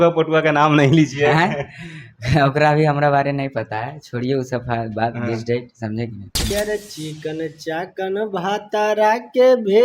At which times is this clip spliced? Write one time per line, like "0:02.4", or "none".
0:06.5

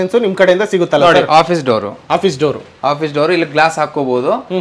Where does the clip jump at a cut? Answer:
none

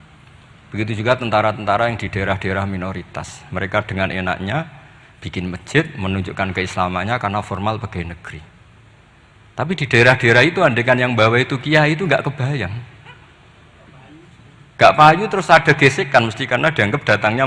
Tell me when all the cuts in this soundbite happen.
none

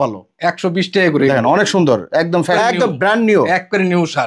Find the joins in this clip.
0:02.6

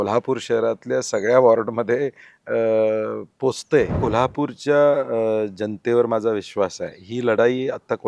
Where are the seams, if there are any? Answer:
0:04.0

